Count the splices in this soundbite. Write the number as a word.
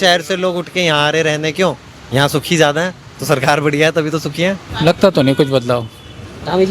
one